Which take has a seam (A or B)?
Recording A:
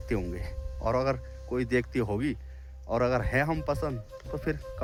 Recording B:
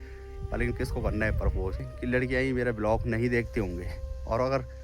B